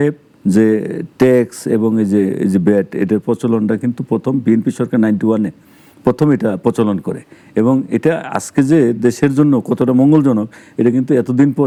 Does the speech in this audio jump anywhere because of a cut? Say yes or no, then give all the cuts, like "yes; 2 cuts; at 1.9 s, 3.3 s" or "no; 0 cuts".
no; 0 cuts